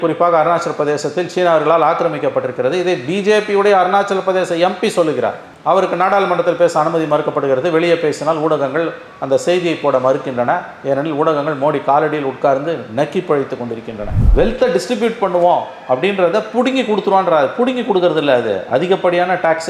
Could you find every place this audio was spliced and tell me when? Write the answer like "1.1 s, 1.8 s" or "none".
14.1 s